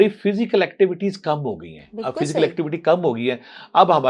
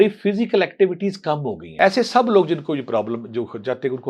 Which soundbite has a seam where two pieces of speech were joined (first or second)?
second